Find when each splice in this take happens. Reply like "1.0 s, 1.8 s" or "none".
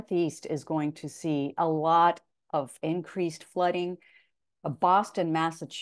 4.3 s